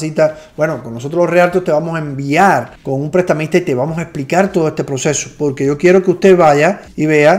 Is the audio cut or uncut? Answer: uncut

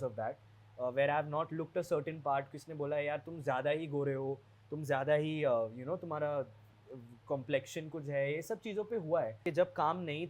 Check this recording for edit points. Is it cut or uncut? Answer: cut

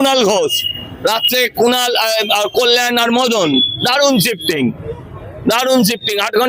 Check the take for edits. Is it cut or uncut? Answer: uncut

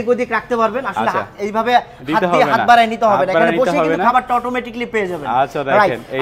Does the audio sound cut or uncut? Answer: uncut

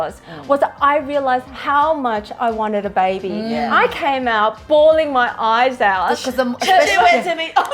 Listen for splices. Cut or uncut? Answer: uncut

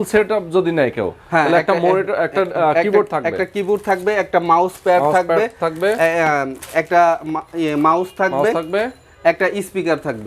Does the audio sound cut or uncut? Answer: uncut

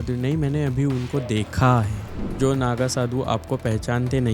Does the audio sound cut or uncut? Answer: cut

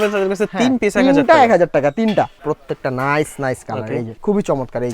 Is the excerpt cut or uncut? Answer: cut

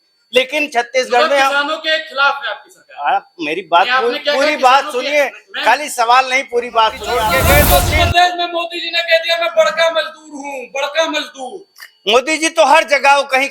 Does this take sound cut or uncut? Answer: cut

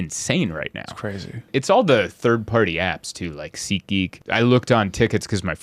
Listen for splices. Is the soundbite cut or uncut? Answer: cut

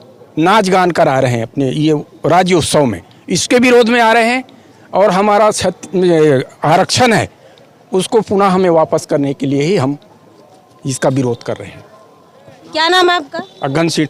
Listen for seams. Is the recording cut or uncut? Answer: uncut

